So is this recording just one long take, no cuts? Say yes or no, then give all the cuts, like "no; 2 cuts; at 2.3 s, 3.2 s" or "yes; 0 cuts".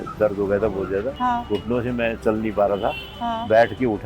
no; 1 cut; at 1.1 s